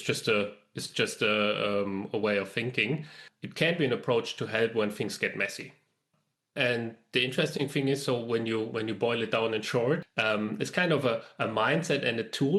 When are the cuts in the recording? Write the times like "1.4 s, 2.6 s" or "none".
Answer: 3.0 s, 10.1 s

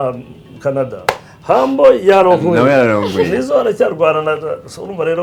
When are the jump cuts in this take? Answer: none

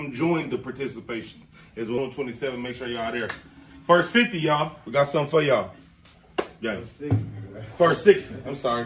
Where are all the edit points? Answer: 2.0 s

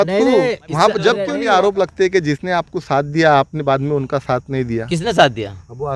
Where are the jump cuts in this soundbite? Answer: 1.3 s

